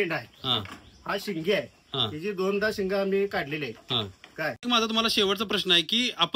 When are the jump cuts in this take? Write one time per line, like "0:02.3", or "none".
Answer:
0:04.6